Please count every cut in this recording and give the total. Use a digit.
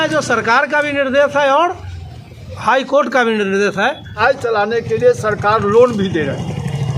1